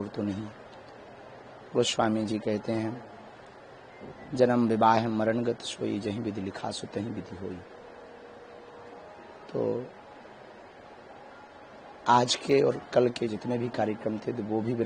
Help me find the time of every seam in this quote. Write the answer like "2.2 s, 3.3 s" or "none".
none